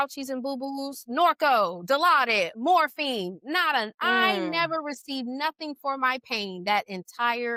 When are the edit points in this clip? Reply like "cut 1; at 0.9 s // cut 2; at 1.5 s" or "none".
none

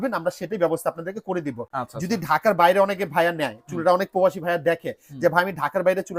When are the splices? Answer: none

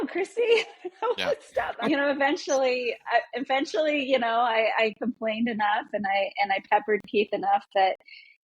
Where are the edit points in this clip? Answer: cut 1; at 1.7 s

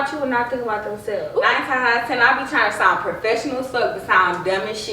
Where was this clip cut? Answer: cut 1; at 1.3 s

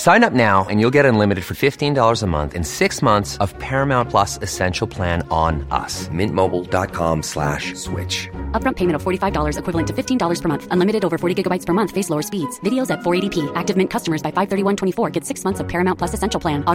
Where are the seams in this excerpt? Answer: none

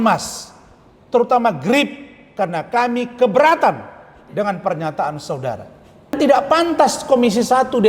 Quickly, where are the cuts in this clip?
cut 1; at 6.1 s

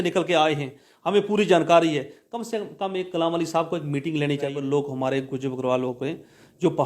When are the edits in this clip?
cut 1; at 4.5 s

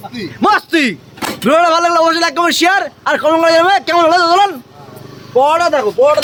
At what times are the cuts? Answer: none

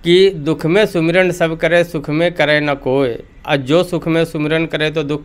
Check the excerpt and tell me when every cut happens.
none

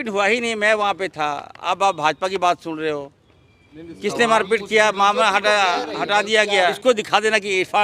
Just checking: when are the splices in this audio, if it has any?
cut 1; at 6.8 s

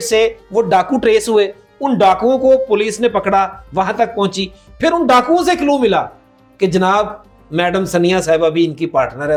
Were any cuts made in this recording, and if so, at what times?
none

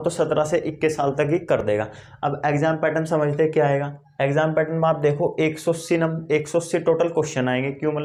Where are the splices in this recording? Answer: none

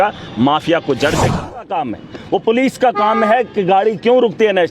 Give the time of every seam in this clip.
cut 1; at 1.6 s

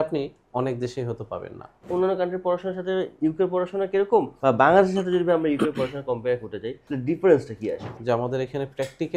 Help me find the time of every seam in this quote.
cut 1; at 1.9 s // cut 2; at 3.1 s // cut 3; at 4.3 s // cut 4; at 6.8 s // cut 5; at 7.9 s

